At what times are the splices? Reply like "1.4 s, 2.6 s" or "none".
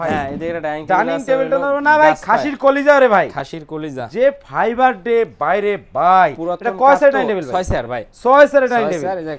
none

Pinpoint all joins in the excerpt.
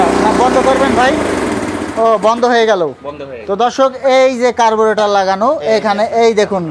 none

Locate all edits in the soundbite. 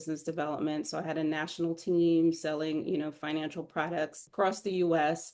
4.2 s

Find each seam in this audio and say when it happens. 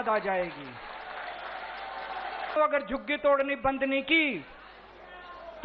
2.6 s

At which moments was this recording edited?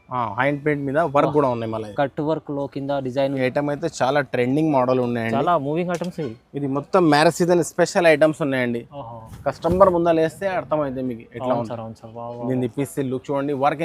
3.4 s

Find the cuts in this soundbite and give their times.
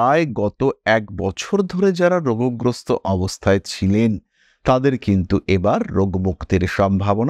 none

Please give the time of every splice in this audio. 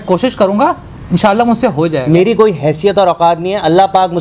2.1 s

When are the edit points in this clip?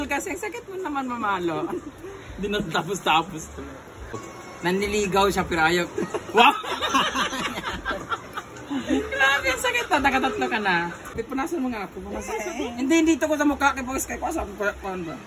4.2 s, 11.2 s

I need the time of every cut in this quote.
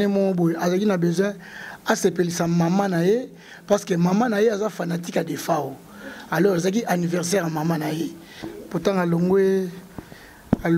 8.5 s

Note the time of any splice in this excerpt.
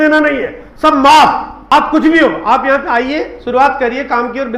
1.7 s

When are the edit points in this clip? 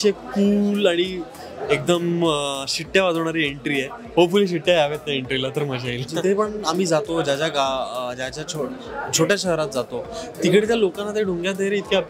6.1 s

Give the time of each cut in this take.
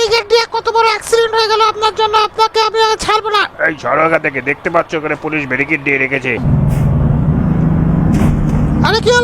6.4 s

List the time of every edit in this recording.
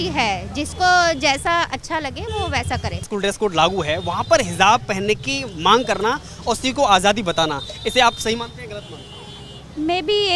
none

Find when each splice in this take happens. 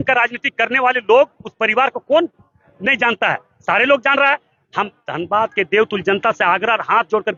none

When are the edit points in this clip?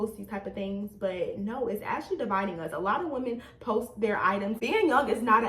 4.6 s

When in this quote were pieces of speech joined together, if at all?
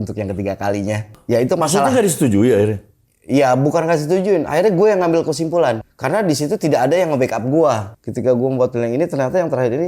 1.1 s, 5.9 s, 7.9 s

